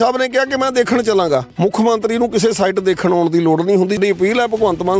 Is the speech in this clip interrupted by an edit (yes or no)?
yes